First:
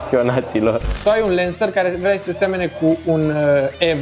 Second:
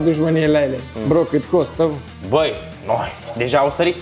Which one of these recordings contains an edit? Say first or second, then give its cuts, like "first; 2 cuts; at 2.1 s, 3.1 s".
first; 1 cut; at 1.0 s